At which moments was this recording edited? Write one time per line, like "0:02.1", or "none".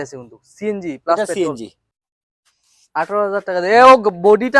0:01.8